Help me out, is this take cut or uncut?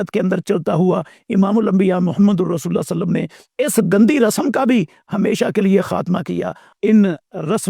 cut